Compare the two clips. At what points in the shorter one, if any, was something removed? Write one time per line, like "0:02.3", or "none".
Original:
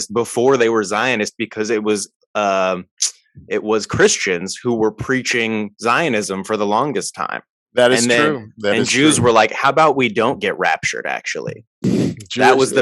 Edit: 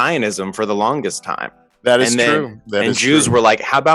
none